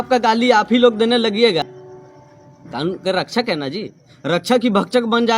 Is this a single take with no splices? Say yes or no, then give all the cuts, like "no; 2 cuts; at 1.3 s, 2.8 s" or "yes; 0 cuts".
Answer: no; 1 cut; at 1.6 s